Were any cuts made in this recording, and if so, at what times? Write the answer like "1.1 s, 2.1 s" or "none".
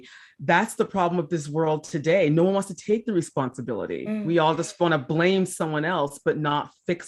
none